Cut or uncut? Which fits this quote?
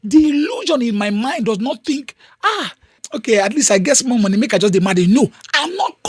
cut